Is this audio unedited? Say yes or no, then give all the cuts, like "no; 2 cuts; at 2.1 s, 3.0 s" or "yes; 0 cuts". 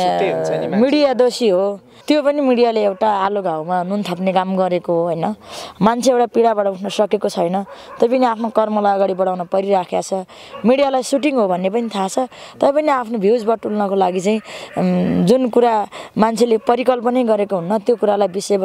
no; 1 cut; at 1.9 s